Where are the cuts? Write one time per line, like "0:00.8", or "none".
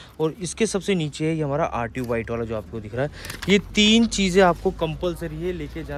none